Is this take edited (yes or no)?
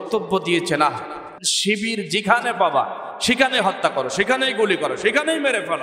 yes